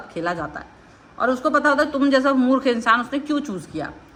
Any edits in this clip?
no; 0 cuts

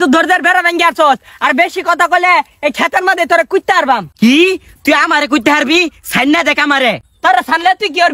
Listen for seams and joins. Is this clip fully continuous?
yes; 0 cuts

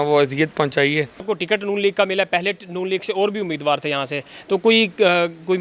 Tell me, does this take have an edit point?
yes; 1 cut; at 1.2 s

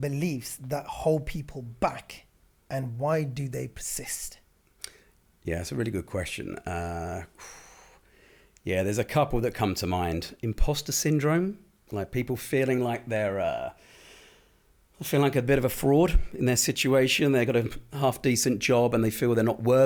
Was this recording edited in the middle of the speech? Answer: no; 0 cuts

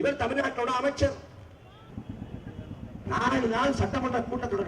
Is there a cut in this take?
yes; 1 cut; at 1.9 s

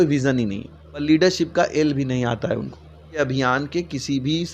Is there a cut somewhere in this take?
yes; 2 cuts; at 1.0 s, 3.2 s

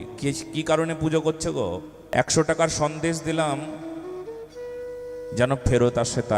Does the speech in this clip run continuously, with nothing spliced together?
no; 1 cut; at 1.9 s

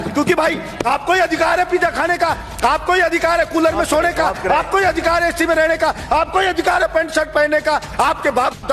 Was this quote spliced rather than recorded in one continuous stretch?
no; 0 cuts

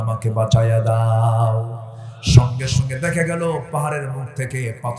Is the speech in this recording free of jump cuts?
yes; 0 cuts

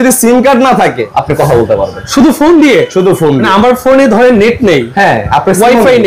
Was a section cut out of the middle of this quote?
yes; 3 cuts; at 1.0 s, 2.0 s, 3.4 s

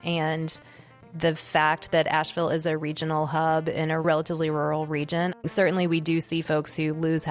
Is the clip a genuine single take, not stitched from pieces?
no; 2 cuts; at 4.0 s, 5.4 s

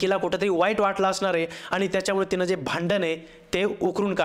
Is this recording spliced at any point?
no; 0 cuts

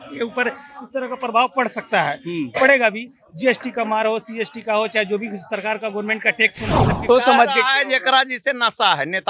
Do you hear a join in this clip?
yes; 1 cut; at 7.0 s

